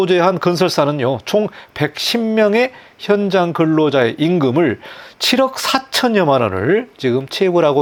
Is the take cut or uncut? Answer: uncut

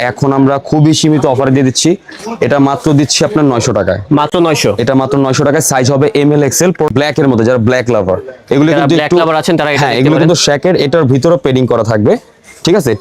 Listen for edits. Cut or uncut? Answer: uncut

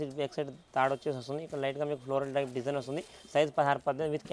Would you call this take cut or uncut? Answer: uncut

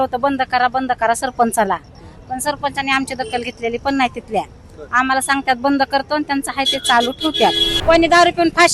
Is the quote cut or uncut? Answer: cut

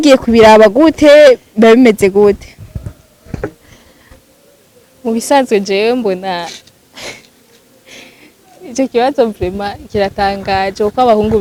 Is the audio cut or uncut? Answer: uncut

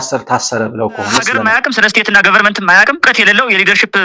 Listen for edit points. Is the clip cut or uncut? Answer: cut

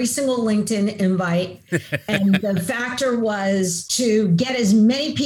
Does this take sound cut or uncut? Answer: cut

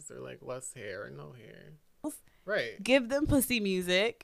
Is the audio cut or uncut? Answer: cut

